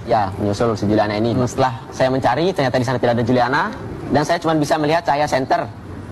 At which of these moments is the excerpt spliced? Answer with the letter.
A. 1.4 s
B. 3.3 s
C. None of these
A